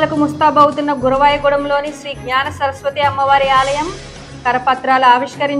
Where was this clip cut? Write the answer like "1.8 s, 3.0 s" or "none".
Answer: none